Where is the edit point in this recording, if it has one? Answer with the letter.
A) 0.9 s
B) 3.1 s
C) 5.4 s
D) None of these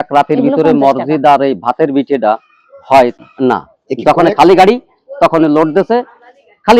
B